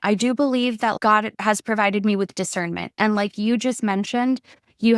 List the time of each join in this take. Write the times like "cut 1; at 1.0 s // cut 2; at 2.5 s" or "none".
cut 1; at 1.0 s